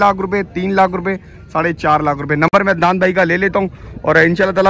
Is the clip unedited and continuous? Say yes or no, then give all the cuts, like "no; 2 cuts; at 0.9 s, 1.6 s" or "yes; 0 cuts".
yes; 0 cuts